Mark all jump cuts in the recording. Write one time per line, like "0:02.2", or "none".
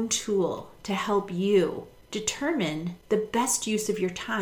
0:01.9
0:03.0